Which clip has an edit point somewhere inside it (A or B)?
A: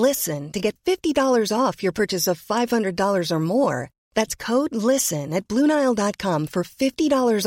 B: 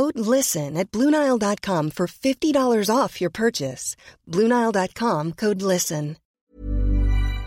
B